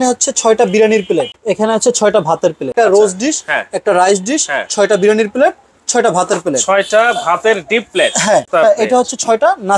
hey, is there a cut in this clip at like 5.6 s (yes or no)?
no